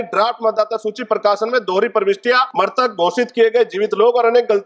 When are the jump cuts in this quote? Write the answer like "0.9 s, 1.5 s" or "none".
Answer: 2.5 s